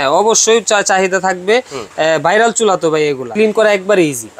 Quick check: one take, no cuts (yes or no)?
no